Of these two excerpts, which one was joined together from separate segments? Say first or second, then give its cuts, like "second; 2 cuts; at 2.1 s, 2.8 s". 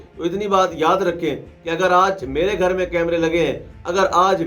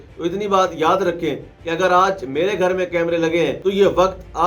second; 1 cut; at 3.6 s